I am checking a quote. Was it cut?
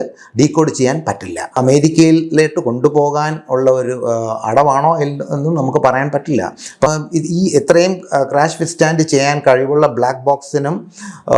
yes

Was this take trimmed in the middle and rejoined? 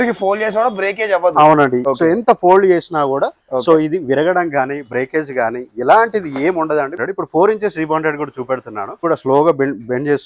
yes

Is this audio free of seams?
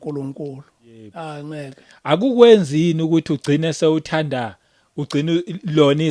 no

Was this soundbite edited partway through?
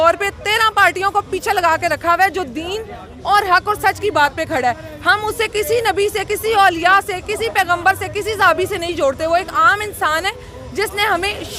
no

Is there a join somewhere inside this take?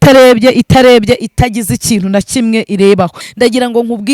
yes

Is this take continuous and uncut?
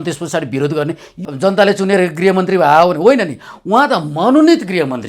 no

